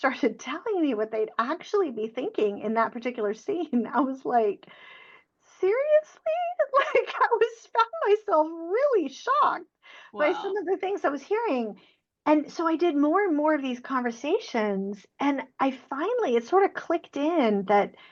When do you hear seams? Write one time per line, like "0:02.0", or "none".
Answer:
none